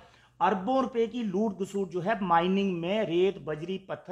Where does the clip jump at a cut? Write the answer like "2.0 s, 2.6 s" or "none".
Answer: none